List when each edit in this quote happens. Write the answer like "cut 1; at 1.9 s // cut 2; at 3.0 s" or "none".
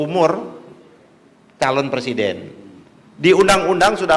none